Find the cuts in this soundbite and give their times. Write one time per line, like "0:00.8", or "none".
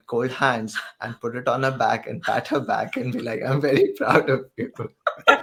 none